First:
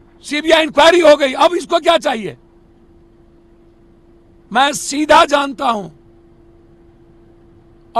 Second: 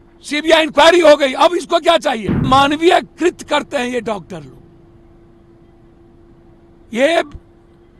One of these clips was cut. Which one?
second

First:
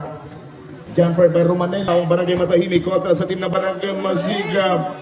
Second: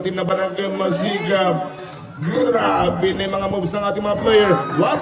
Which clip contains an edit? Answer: first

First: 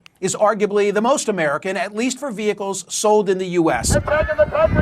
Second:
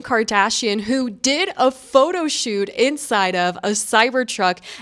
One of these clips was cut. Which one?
first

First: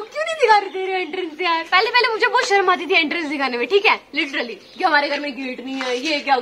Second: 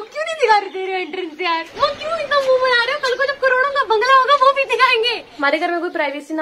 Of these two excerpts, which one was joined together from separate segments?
second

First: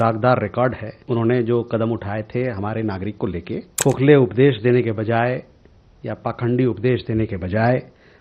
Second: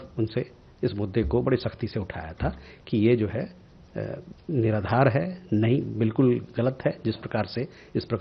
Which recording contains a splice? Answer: first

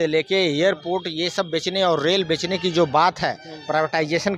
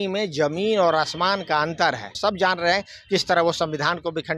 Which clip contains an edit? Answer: second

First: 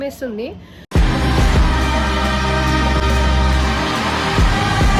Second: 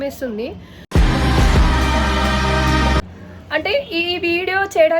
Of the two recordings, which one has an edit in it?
second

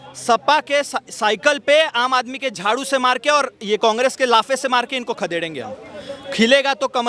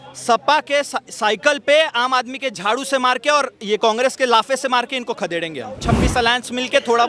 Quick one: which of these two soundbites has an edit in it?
second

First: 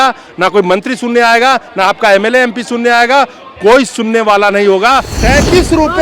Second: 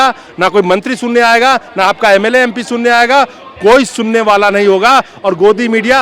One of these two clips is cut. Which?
first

